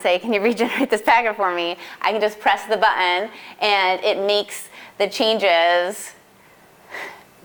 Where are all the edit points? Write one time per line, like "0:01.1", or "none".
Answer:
none